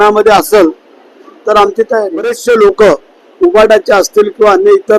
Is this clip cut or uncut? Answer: cut